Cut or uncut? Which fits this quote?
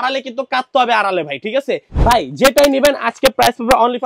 cut